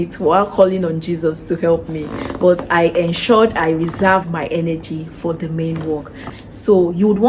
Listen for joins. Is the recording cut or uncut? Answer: uncut